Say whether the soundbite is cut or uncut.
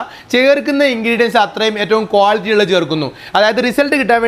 uncut